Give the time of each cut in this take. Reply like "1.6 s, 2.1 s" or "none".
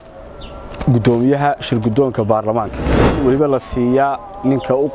2.9 s